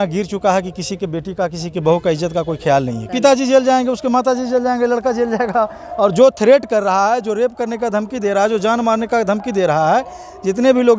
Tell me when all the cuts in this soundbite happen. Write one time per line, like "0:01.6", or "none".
0:03.1